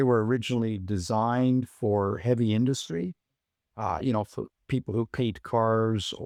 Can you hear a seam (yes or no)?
no